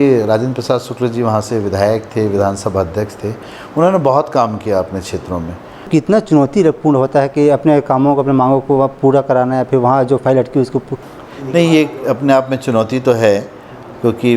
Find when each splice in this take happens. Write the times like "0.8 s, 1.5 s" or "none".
5.9 s

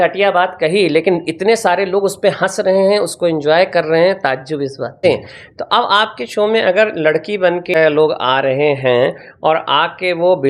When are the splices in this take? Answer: 5.0 s, 7.7 s

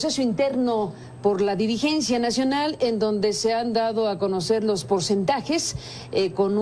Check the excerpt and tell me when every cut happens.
3.8 s

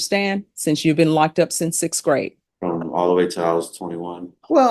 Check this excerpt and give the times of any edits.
2.4 s

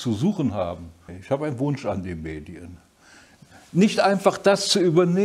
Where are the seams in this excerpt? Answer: 1.1 s

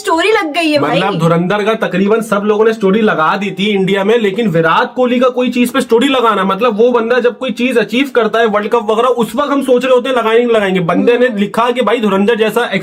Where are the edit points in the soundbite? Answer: none

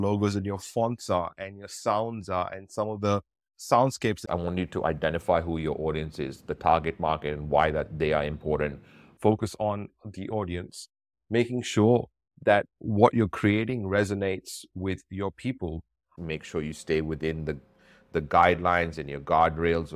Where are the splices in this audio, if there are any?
4.2 s, 9.1 s, 16.1 s

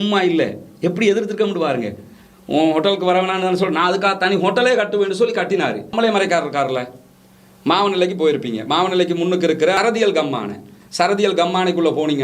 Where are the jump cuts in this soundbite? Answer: 5.9 s, 9.7 s

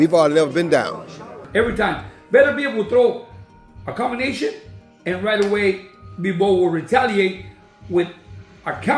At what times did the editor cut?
1.4 s

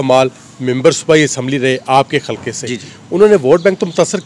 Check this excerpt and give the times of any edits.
none

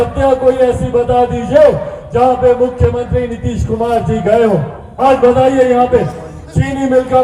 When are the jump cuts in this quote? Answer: 4.8 s

